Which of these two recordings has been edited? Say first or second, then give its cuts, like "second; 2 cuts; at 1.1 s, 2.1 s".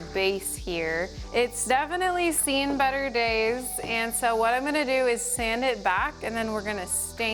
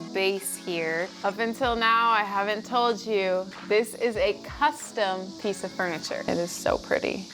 second; 2 cuts; at 1.1 s, 6.3 s